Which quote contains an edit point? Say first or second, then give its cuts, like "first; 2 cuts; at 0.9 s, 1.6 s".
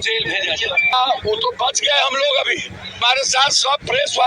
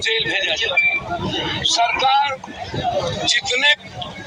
first; 2 cuts; at 0.9 s, 3.0 s